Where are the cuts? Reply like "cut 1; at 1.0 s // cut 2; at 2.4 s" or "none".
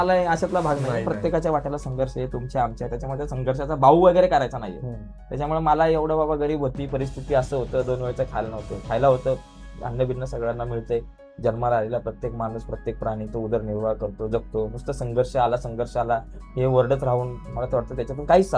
none